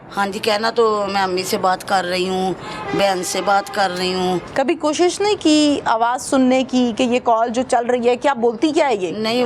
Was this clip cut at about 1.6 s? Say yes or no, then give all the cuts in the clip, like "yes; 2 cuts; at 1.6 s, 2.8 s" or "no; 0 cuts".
no; 1 cut; at 4.5 s